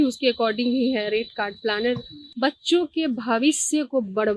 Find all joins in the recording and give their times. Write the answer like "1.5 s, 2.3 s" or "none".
2.2 s